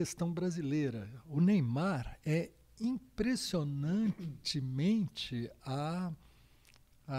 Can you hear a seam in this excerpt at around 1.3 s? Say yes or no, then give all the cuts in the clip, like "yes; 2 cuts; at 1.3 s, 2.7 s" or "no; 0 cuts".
yes; 1 cut; at 1.3 s